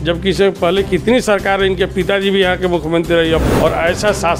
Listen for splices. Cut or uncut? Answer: cut